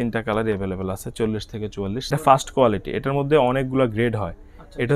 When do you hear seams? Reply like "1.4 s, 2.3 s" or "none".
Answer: 2.0 s